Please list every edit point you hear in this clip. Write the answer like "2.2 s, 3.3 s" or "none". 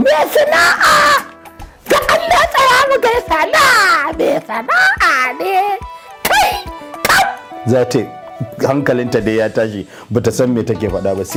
none